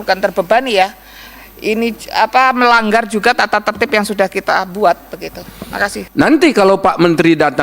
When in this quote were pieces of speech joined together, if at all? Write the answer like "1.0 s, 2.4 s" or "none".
6.0 s